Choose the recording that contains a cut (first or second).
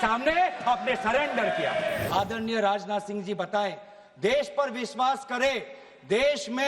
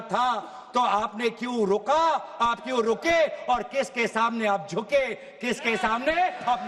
first